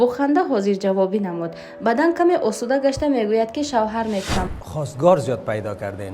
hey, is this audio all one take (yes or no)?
no